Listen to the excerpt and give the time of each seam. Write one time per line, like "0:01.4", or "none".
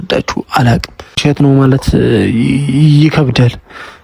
0:01.2